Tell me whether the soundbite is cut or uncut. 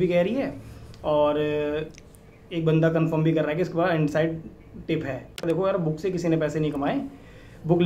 cut